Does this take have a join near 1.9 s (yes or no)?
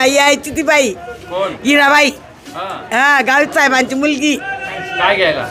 no